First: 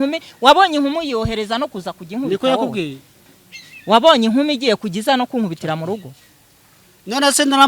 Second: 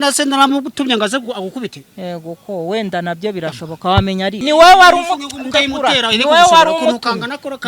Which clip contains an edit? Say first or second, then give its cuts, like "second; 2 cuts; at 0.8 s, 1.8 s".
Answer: second; 1 cut; at 4.4 s